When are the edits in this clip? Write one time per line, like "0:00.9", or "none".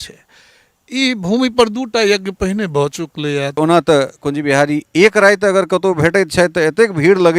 0:03.6

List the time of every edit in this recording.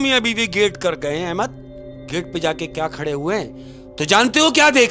none

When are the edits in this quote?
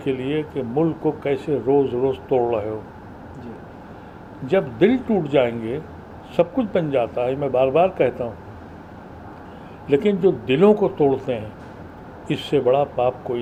none

